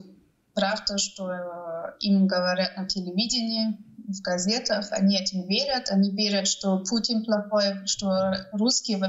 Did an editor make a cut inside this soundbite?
no; 0 cuts

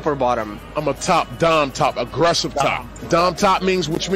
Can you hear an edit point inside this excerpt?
yes; 1 cut; at 2.9 s

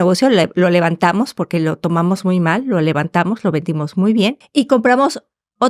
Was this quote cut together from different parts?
yes; 1 cut; at 4.4 s

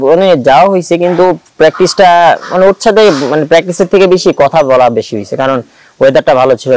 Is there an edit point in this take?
no; 0 cuts

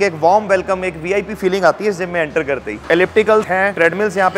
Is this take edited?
yes; 1 cut; at 2.8 s

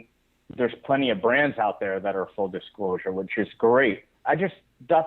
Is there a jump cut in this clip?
yes; 1 cut; at 4.1 s

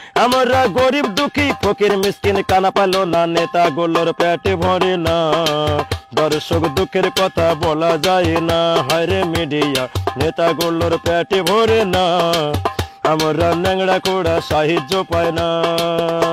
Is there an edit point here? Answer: no; 0 cuts

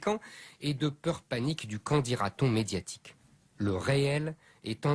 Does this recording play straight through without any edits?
yes; 0 cuts

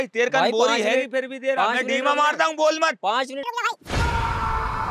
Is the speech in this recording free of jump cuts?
yes; 0 cuts

